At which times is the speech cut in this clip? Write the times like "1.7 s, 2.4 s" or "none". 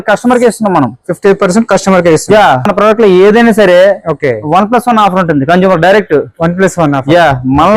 2.7 s